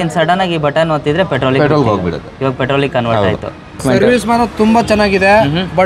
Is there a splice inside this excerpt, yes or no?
yes